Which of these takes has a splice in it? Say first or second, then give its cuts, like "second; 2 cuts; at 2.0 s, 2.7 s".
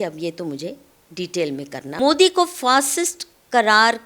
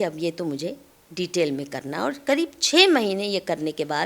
first; 1 cut; at 1.8 s